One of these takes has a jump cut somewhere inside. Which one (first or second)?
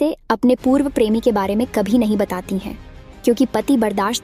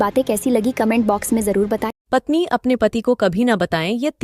second